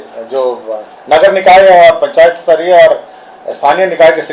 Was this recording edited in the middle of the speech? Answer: no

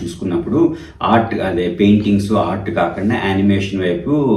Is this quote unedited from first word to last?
yes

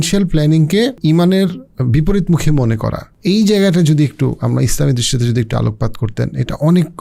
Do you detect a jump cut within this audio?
yes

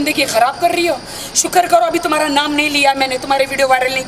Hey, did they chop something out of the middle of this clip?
no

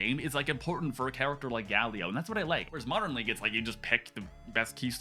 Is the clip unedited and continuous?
no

